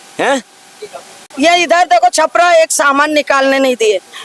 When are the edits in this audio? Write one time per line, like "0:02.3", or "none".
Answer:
0:01.2